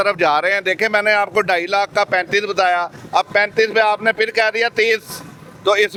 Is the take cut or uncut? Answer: uncut